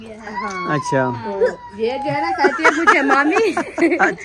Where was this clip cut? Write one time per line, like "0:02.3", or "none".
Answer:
0:01.6